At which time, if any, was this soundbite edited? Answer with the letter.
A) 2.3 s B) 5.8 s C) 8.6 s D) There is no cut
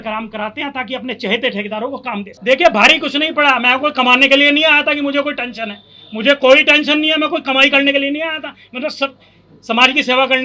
A